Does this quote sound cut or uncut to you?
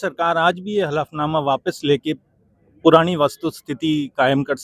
uncut